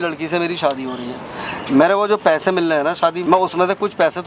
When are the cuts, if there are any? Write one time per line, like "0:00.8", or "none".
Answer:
0:03.2